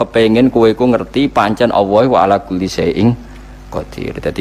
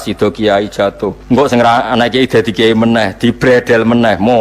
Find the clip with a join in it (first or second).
second